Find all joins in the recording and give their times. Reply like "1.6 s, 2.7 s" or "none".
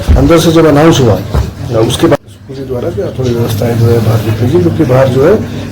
2.1 s